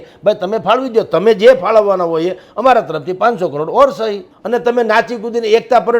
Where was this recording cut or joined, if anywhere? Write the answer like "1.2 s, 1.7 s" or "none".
4.3 s